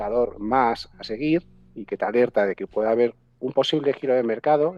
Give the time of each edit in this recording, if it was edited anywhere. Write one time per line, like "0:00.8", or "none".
none